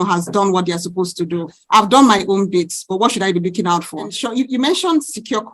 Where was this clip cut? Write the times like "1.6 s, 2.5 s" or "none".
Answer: 4.1 s